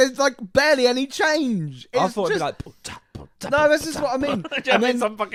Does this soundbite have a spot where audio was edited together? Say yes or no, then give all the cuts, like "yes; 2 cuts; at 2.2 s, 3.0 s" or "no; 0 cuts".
no; 0 cuts